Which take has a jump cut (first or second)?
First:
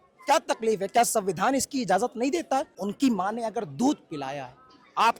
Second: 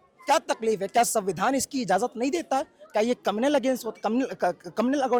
first